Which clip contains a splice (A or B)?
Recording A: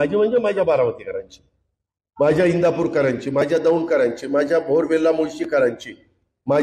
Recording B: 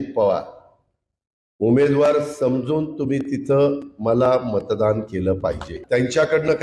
B